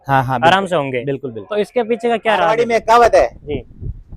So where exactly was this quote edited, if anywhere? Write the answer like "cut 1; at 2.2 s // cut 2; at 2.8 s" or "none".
cut 1; at 2.5 s